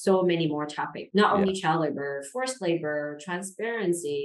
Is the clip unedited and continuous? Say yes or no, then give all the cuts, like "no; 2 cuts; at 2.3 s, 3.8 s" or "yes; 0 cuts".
yes; 0 cuts